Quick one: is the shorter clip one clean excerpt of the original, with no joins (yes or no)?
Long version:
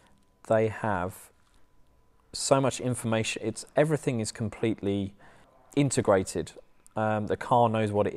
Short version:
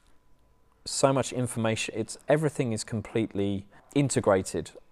no